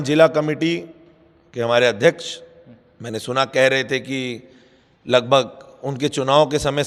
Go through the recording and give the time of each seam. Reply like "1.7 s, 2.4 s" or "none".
none

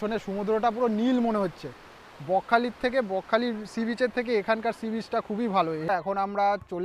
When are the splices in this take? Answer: 5.9 s

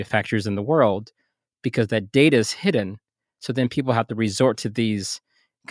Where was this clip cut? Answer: none

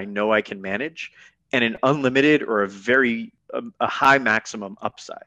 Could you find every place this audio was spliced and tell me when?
3.4 s

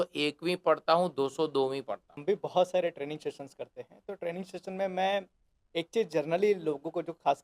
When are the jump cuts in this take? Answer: 2.1 s

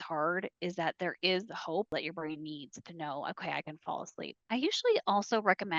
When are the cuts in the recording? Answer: 1.9 s, 4.4 s

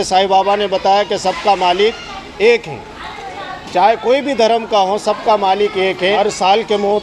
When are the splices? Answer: 6.0 s

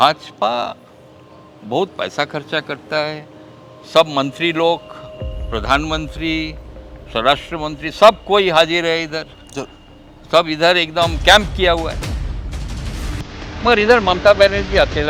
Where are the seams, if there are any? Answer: none

